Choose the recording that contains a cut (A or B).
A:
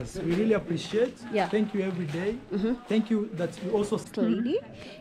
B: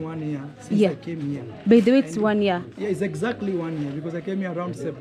A